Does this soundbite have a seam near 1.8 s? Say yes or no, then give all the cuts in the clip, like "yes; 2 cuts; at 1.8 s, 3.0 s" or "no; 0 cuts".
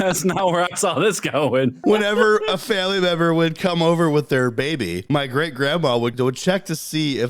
yes; 3 cuts; at 1.8 s, 5.0 s, 6.1 s